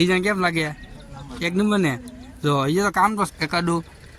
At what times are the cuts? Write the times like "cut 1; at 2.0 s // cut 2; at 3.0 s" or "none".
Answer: cut 1; at 3.3 s